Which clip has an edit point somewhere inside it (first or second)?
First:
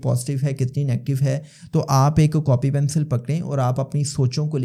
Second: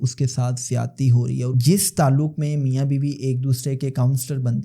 second